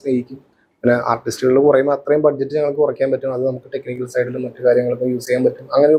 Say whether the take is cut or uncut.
uncut